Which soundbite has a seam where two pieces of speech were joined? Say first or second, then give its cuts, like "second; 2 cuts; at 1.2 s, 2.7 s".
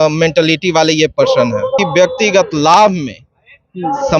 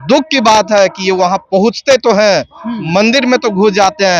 first; 1 cut; at 1.8 s